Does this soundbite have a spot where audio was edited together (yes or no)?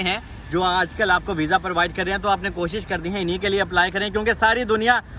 no